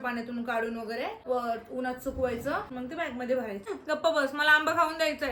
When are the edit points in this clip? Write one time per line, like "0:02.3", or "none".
0:01.2
0:02.7
0:03.6